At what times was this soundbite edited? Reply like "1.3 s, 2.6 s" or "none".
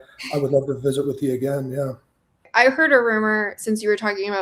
2.5 s